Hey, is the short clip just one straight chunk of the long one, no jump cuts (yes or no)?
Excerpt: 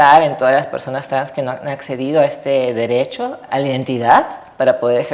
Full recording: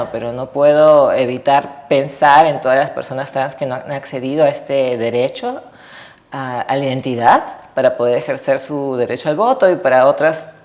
no